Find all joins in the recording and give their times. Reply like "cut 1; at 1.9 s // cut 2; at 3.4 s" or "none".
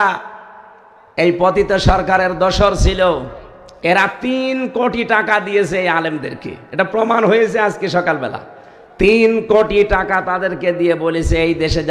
none